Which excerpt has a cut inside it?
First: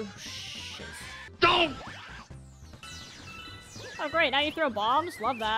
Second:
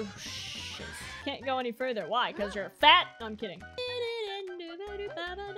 second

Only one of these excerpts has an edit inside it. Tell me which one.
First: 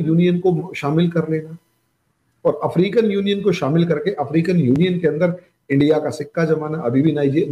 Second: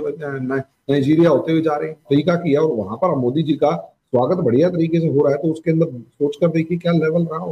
second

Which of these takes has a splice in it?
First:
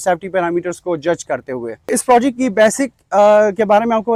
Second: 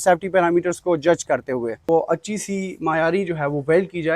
second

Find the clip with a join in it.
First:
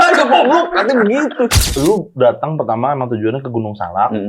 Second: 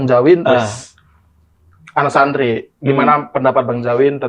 first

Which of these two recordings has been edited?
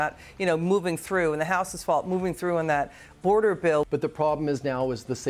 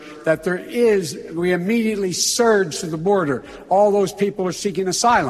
first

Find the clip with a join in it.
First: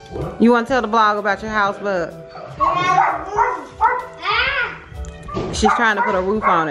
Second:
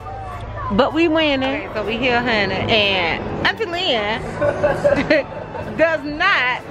second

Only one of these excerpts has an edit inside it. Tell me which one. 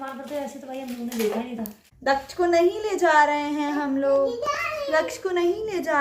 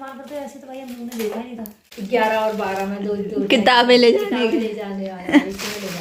first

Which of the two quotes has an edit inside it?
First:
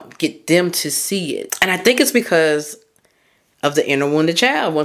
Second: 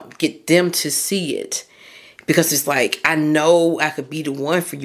first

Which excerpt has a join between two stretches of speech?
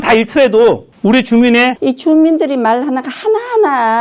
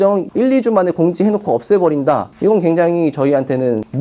first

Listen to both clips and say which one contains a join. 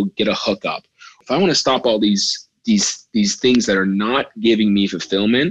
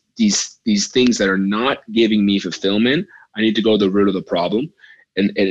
first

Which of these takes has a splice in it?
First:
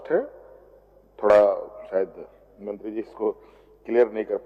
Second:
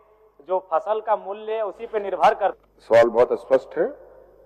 second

